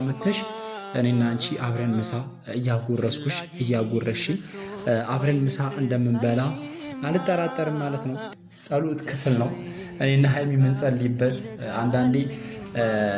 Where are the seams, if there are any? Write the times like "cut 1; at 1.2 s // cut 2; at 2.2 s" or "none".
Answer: cut 1; at 8.2 s

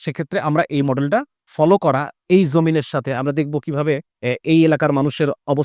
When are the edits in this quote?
cut 1; at 1.4 s // cut 2; at 4.1 s

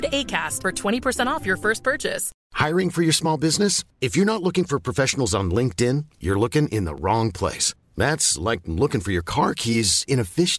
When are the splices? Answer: cut 1; at 2.3 s

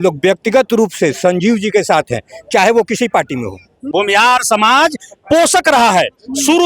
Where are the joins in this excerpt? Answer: cut 1; at 3.9 s

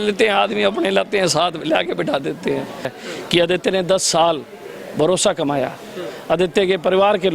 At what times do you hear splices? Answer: cut 1; at 2.9 s

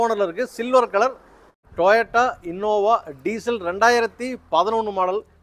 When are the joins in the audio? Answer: cut 1; at 1.6 s

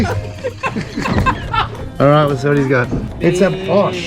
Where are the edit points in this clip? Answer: cut 1; at 1.7 s // cut 2; at 3.0 s

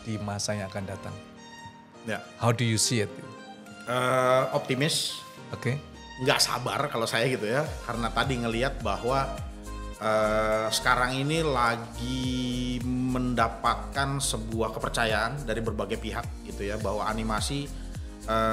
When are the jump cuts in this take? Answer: none

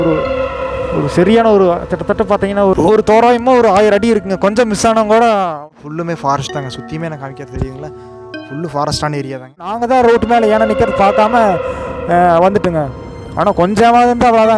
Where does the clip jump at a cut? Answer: cut 1; at 5.5 s // cut 2; at 9.8 s

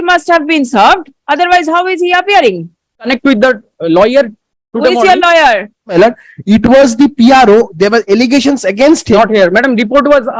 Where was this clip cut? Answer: cut 1; at 3.1 s // cut 2; at 5.9 s // cut 3; at 9.2 s

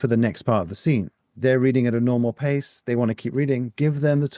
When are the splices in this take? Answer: cut 1; at 1.2 s

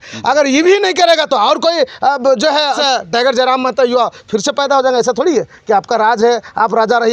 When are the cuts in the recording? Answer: cut 1; at 2.8 s

